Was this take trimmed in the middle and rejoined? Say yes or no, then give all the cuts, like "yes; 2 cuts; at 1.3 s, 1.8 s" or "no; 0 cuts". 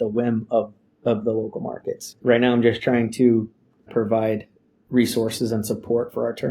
yes; 2 cuts; at 2.1 s, 3.9 s